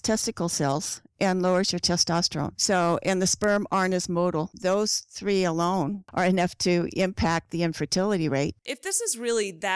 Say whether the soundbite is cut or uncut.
cut